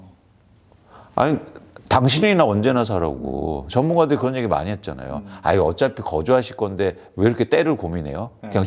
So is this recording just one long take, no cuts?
yes; 0 cuts

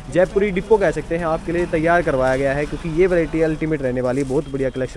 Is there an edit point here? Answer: no; 0 cuts

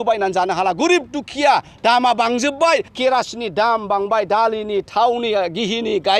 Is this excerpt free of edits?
no; 1 cut; at 2.9 s

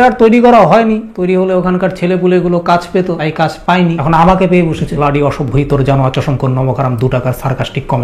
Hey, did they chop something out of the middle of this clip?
no; 0 cuts

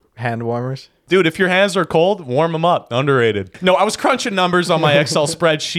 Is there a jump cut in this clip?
yes; 2 cuts; at 0.9 s, 3.5 s

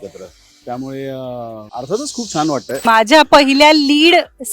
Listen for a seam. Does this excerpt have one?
yes; 2 cuts; at 1.6 s, 2.8 s

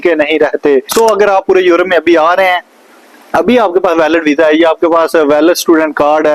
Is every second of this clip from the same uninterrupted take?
no; 1 cut; at 0.9 s

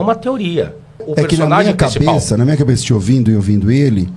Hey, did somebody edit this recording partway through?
yes; 1 cut; at 1.1 s

